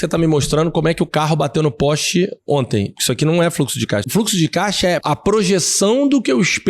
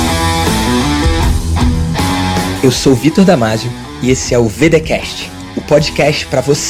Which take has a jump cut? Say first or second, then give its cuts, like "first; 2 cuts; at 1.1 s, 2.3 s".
first; 2 cuts; at 4.1 s, 5.0 s